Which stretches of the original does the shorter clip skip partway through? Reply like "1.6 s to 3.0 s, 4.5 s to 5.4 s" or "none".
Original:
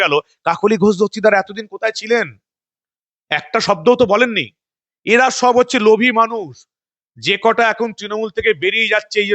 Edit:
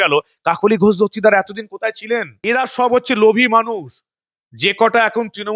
2.3 s to 5.0 s